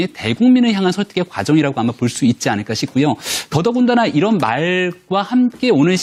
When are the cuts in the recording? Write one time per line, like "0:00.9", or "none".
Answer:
none